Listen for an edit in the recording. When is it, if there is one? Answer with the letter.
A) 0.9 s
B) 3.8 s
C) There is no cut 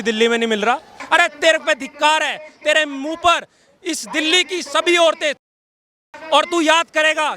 A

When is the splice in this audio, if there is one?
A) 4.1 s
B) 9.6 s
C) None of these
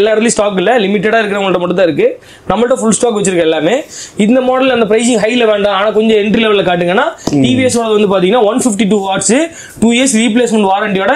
C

